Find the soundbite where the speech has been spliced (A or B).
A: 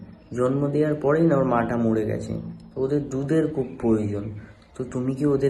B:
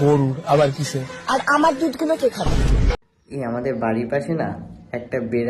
B